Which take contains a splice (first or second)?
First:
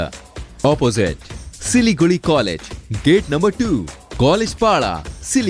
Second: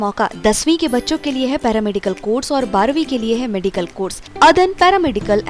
second